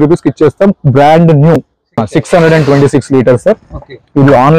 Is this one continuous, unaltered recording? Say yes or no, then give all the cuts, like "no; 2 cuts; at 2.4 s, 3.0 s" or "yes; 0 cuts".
no; 1 cut; at 2.0 s